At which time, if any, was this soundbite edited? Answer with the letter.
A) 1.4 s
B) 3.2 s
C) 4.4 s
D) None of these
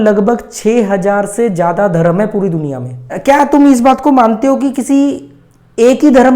B